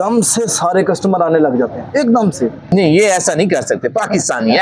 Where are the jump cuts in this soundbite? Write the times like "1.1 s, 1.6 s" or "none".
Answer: 2.7 s